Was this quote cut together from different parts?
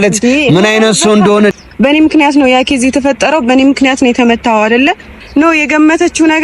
yes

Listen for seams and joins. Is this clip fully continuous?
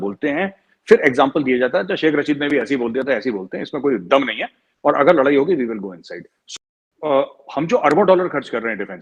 no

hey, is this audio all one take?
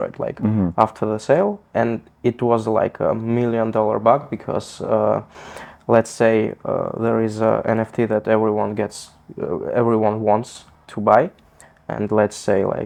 yes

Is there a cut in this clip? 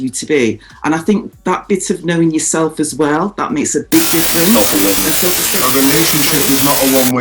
yes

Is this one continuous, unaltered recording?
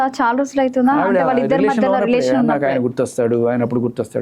yes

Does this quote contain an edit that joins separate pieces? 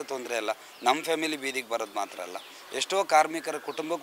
no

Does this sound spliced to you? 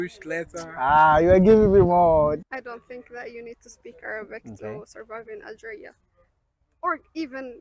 yes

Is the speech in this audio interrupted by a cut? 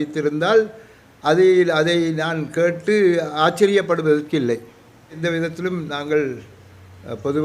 yes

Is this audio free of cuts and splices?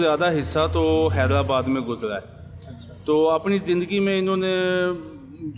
yes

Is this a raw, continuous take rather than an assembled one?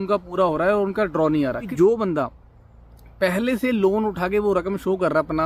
no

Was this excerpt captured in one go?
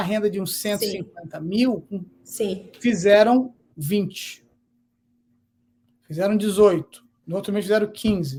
yes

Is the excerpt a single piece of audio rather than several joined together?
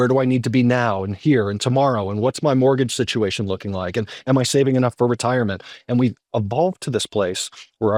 yes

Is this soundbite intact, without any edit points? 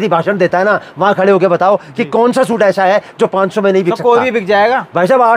yes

